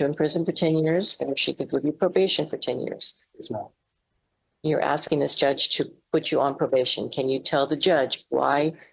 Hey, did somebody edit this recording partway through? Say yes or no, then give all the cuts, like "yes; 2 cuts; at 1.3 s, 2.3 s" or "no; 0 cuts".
no; 0 cuts